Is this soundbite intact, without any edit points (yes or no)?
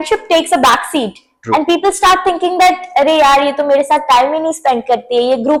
yes